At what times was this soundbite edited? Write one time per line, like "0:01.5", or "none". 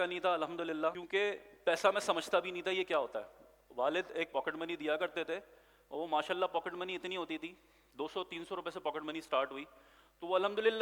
0:01.0